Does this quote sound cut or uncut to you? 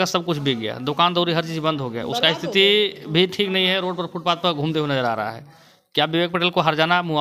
uncut